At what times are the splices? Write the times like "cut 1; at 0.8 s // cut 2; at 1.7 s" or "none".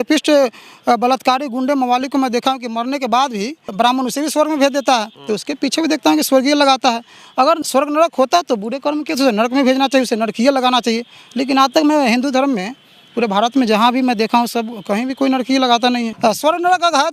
cut 1; at 3.7 s // cut 2; at 5.1 s // cut 3; at 7.6 s // cut 4; at 16.1 s